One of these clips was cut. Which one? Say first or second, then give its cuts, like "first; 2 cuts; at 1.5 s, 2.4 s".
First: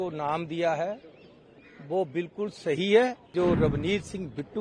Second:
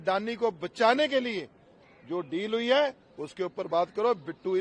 first; 1 cut; at 3.3 s